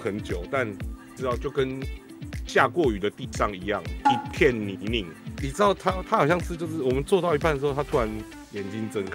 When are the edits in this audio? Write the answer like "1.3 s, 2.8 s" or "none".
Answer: none